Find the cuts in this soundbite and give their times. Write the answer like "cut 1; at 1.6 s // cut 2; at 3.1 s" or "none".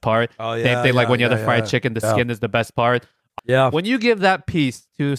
cut 1; at 3.3 s